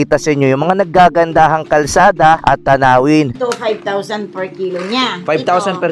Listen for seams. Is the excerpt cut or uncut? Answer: cut